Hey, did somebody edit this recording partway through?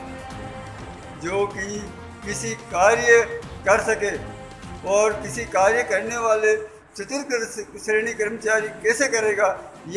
yes; 1 cut; at 1.1 s

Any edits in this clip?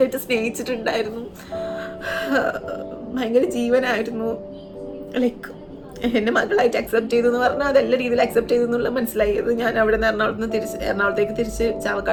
no; 0 cuts

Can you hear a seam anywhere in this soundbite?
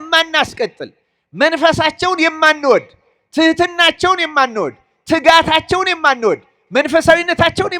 no; 0 cuts

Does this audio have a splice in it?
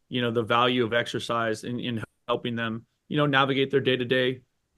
no; 0 cuts

